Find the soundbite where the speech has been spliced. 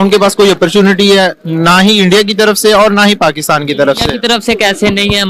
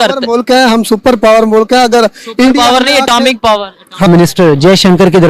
second; 1 cut; at 4.1 s

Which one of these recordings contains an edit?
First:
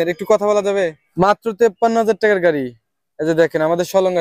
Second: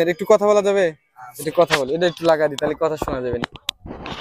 first; 1 cut; at 1.0 s

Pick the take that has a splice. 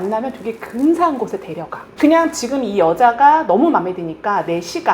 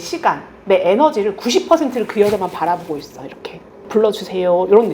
first; 1 cut; at 1.9 s

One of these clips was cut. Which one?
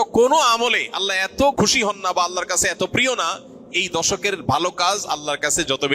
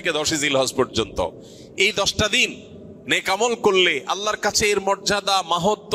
first; 1 cut; at 1.5 s

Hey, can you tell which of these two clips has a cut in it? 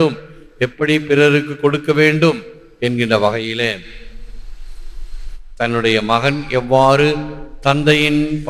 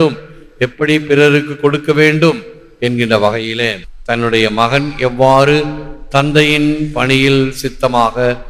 second; 1 cut; at 3.9 s

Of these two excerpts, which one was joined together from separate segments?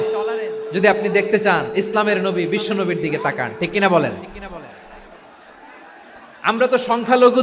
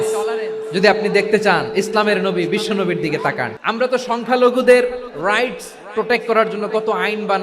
second; 1 cut; at 3.5 s

